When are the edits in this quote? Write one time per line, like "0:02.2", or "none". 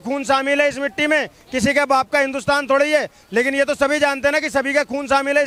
none